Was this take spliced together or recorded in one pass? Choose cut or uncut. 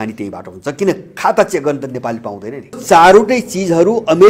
cut